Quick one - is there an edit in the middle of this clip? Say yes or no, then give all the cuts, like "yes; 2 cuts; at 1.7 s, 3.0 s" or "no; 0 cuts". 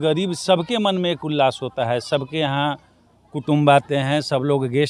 no; 0 cuts